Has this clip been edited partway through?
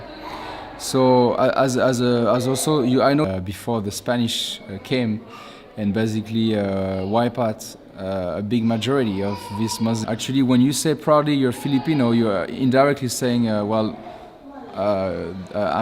yes; 2 cuts; at 3.2 s, 10.0 s

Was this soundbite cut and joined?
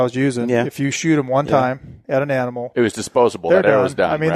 no; 0 cuts

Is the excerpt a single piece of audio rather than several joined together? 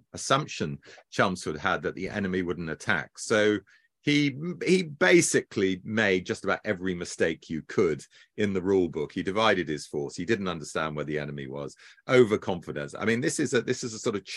yes; 0 cuts

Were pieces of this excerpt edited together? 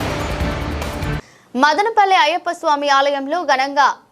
no; 0 cuts

